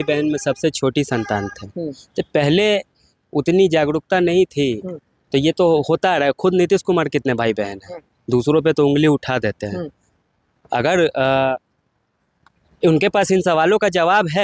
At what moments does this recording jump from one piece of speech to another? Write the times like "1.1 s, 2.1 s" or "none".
none